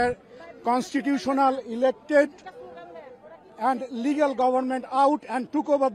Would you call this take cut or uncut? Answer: uncut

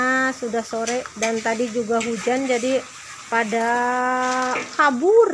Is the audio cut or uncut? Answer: uncut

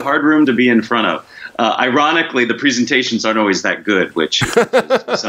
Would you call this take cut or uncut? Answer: uncut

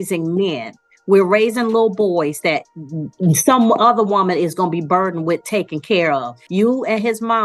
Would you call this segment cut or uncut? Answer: cut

